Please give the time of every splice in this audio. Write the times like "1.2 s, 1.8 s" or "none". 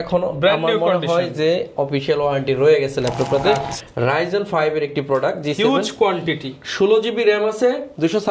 3.8 s